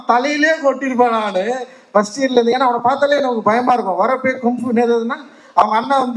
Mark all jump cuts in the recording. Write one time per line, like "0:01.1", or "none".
none